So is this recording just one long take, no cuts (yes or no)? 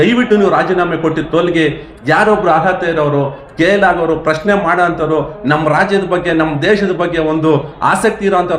yes